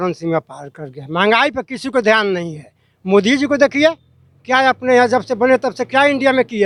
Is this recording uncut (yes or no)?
yes